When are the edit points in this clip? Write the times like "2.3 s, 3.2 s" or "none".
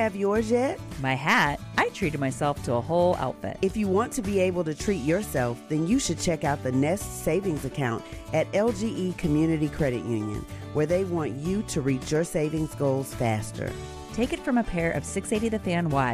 none